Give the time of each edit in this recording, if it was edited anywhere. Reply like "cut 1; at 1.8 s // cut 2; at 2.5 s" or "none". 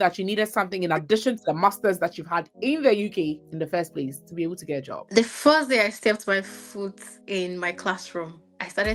cut 1; at 5.0 s